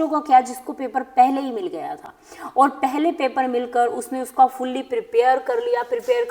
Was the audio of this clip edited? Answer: no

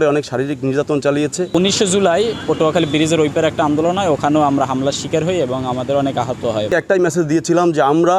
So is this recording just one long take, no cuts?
no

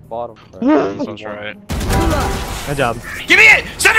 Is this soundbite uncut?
yes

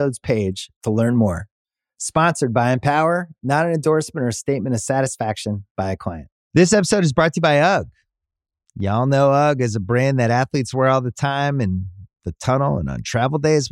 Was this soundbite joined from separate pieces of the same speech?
yes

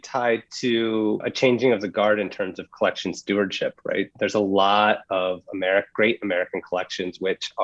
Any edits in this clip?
yes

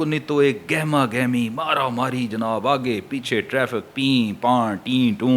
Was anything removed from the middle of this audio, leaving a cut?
no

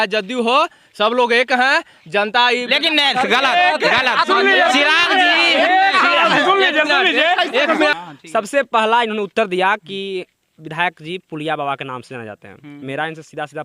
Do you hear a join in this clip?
yes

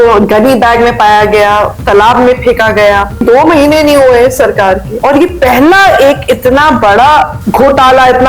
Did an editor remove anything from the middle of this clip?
yes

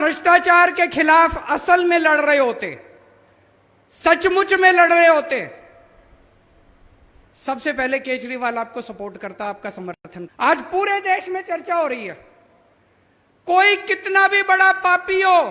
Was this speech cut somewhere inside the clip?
yes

